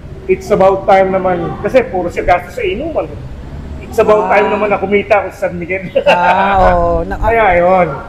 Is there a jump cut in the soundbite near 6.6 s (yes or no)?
no